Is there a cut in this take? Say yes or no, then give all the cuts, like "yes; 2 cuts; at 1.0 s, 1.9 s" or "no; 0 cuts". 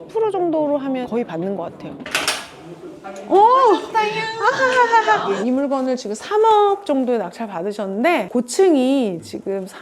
yes; 3 cuts; at 2.0 s, 5.3 s, 8.3 s